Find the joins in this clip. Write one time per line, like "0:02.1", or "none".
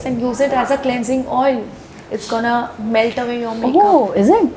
none